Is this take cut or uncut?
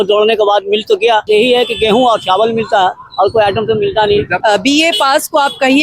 cut